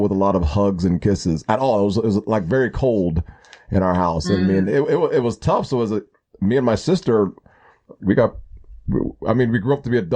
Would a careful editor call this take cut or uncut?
uncut